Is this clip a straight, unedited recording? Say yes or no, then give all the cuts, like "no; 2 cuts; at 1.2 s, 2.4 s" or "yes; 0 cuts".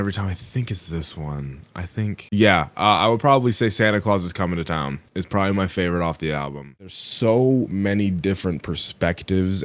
no; 1 cut; at 6.9 s